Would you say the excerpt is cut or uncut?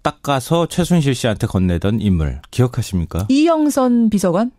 cut